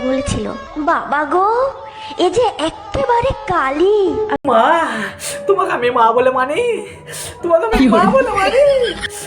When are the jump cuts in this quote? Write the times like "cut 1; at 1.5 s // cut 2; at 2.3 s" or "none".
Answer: cut 1; at 4.4 s